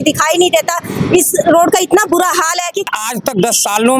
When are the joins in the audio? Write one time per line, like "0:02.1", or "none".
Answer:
0:02.9